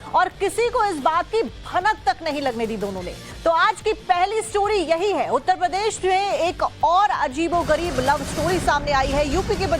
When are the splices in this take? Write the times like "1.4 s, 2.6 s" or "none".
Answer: 1.3 s